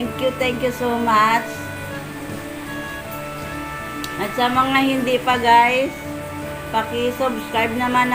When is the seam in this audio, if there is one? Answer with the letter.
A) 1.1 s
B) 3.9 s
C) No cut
C